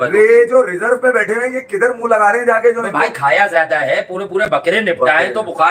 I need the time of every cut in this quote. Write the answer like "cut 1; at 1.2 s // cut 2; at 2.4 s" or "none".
none